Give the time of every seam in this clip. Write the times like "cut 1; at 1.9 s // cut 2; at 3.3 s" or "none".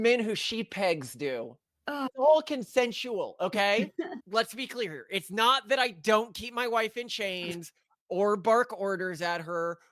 cut 1; at 2.1 s // cut 2; at 4.2 s